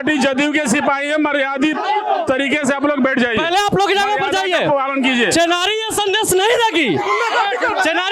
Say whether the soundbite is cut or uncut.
uncut